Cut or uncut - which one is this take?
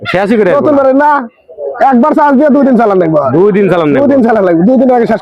uncut